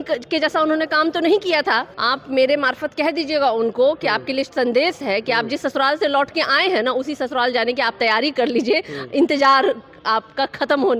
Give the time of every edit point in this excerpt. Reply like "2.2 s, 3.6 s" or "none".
1.9 s